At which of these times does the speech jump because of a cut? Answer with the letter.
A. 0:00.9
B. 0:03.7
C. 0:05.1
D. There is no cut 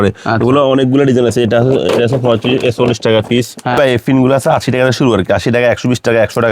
B